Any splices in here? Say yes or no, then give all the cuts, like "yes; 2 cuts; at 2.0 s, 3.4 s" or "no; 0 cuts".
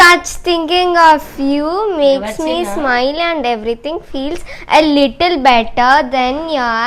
no; 0 cuts